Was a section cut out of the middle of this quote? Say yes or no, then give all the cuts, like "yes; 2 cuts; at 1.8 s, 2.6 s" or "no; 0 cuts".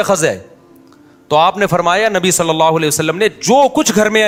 no; 0 cuts